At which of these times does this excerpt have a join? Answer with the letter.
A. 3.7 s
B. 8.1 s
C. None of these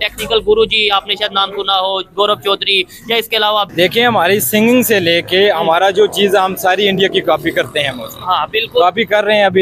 A